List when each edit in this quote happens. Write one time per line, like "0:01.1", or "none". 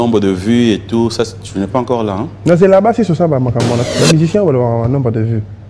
0:03.8

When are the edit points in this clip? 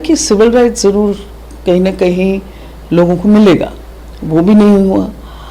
none

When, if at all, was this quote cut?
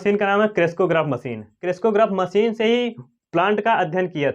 0:01.6

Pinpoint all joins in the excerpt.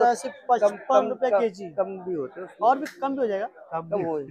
none

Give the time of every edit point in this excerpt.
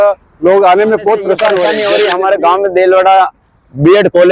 0:01.8

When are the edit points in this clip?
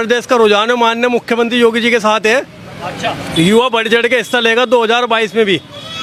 none

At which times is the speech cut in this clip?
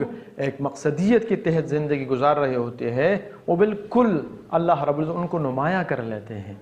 none

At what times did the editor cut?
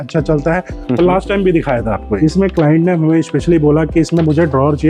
0:02.1

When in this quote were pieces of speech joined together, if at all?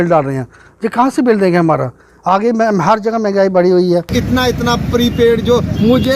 0:04.1

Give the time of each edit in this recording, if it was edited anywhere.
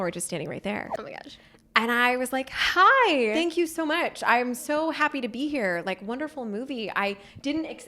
0:03.4

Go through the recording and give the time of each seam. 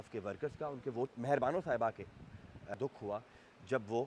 0:01.1
0:02.7

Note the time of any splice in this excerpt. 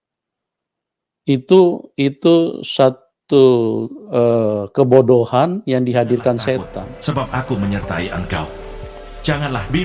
0:06.9

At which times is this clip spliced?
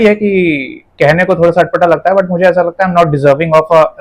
none

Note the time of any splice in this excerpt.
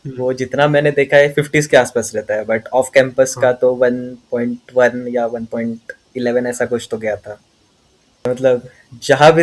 0:08.3

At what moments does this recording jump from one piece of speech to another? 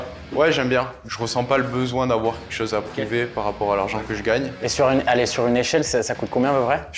0:01.0
0:04.5

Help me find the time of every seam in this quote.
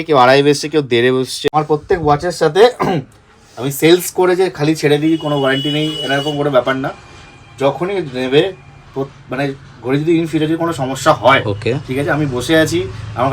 0:01.5

